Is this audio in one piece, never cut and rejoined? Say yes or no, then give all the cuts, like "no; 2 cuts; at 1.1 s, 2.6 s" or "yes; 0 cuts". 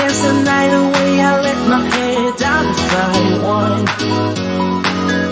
yes; 0 cuts